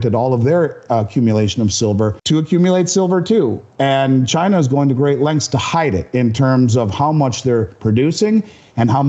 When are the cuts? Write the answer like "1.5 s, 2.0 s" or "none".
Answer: 2.2 s